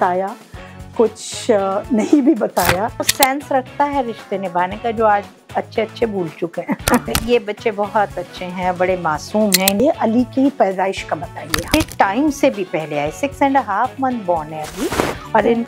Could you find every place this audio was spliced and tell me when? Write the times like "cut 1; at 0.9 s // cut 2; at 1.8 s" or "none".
cut 1; at 3.1 s // cut 2; at 7.1 s // cut 3; at 9.8 s // cut 4; at 11.7 s